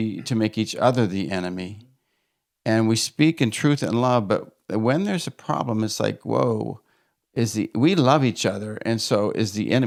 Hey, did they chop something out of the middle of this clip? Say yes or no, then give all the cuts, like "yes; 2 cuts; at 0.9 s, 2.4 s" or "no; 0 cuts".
no; 0 cuts